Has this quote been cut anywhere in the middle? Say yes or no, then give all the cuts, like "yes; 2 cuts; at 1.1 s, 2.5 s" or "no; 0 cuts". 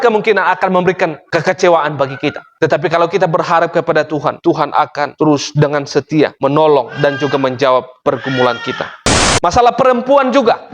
yes; 1 cut; at 9.1 s